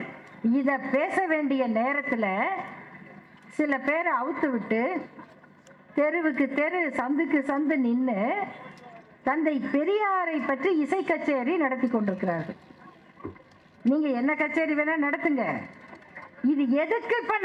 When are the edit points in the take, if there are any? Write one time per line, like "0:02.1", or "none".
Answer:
none